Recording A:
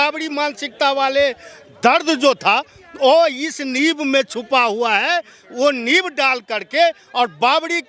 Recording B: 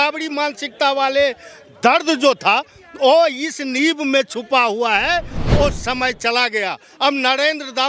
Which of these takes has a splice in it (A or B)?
B